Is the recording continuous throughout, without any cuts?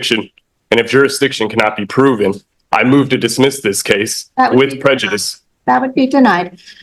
yes; 0 cuts

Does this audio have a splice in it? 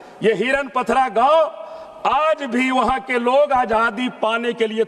no; 0 cuts

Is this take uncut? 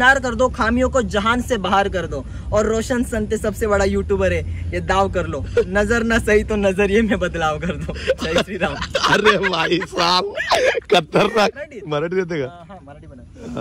no; 1 cut; at 11.6 s

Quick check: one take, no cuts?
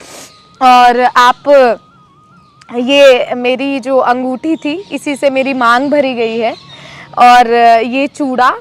yes; 0 cuts

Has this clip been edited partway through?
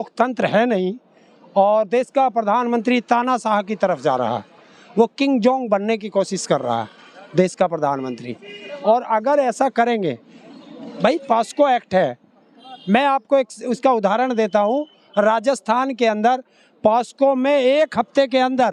no; 0 cuts

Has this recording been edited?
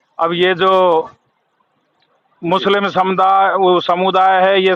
yes; 1 cut; at 0.9 s

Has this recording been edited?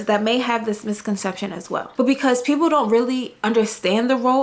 yes; 1 cut; at 1.8 s

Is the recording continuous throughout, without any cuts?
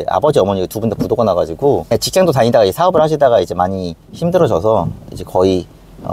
no; 1 cut; at 1.9 s

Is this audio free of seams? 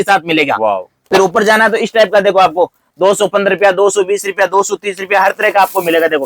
no; 1 cut; at 1.0 s

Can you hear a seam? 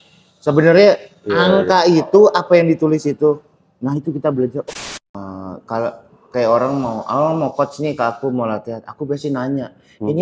yes; 1 cut; at 4.6 s

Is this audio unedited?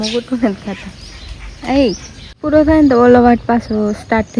no; 1 cut; at 2.4 s

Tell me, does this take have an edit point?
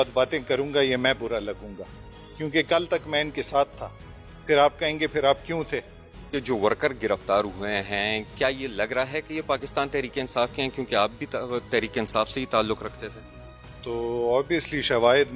yes; 1 cut; at 6.3 s

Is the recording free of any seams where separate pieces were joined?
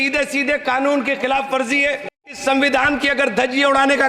no; 1 cut; at 2.3 s

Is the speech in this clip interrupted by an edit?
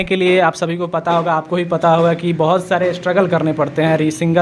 no; 0 cuts

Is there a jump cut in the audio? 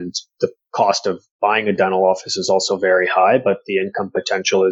no; 0 cuts

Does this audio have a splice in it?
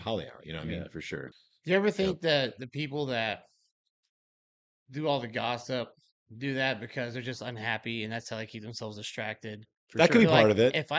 yes; 1 cut; at 1.3 s

